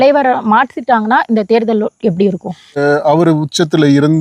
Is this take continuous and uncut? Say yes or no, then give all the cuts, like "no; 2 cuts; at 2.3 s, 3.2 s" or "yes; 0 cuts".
no; 1 cut; at 2.8 s